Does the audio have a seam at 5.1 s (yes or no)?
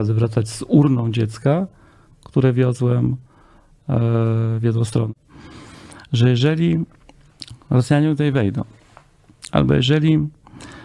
yes